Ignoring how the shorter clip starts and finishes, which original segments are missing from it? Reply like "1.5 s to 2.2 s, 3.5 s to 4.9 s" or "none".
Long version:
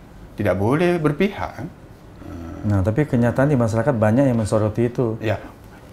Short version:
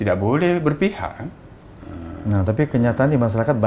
none